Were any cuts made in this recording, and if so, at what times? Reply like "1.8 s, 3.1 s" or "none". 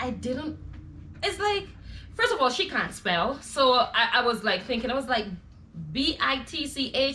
none

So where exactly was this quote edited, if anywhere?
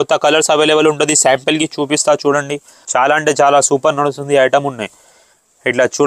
2.8 s

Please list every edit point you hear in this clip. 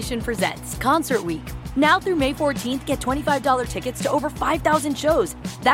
none

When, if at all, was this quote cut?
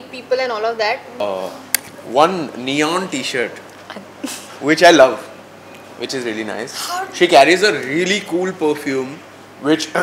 1.2 s

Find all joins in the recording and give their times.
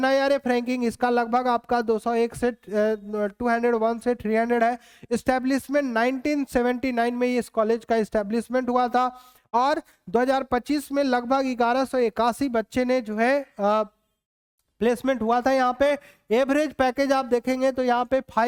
none

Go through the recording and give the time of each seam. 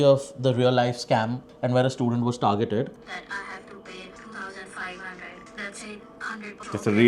1.5 s, 3.0 s

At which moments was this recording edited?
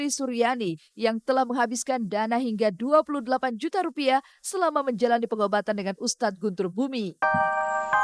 7.1 s

